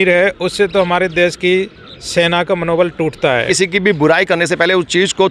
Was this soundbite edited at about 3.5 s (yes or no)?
yes